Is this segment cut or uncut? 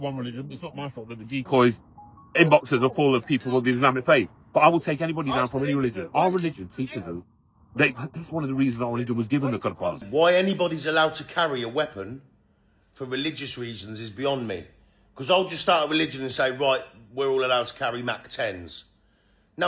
cut